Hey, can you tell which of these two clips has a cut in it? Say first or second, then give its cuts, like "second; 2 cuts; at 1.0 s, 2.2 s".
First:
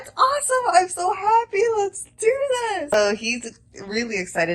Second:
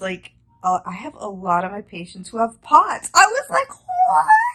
first; 1 cut; at 2.9 s